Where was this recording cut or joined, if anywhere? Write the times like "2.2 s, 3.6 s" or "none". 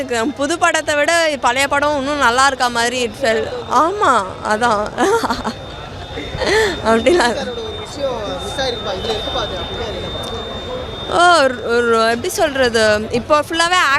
none